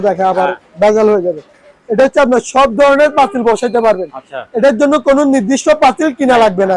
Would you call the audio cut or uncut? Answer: uncut